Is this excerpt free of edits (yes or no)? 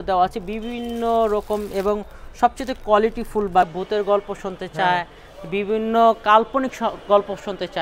no